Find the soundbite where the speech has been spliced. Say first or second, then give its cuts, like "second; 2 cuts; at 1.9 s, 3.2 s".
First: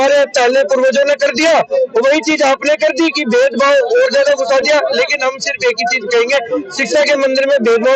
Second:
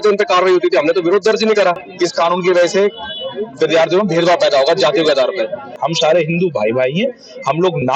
second; 2 cuts; at 1.9 s, 5.7 s